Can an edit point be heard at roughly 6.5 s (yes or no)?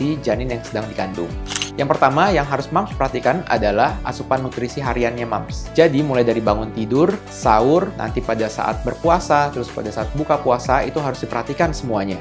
no